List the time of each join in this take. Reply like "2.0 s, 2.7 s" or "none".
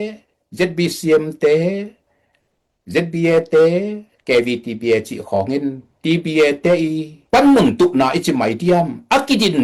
none